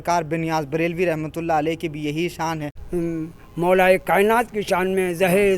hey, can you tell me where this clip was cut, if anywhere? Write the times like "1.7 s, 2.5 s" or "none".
2.7 s